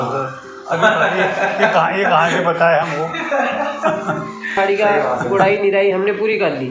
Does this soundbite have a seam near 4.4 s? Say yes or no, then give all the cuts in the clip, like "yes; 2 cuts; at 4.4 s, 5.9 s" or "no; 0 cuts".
yes; 1 cut; at 4.4 s